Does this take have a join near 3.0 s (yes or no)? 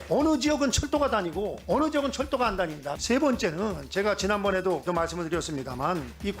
yes